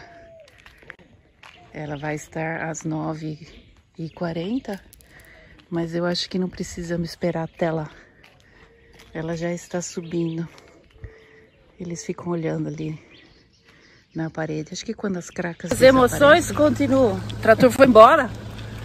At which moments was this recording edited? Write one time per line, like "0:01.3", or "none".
0:15.6